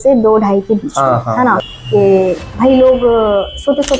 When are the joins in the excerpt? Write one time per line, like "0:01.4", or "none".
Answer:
0:01.7